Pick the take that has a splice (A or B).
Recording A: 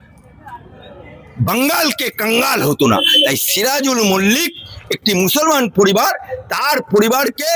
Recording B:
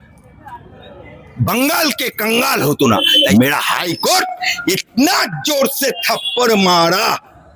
B